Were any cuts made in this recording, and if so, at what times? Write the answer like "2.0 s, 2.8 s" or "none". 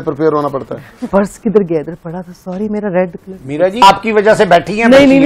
1.1 s, 3.8 s